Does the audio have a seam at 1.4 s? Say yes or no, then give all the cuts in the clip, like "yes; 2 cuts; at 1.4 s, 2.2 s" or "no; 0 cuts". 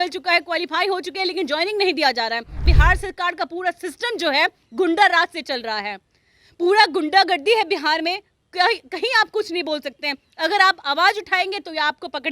no; 1 cut; at 2.6 s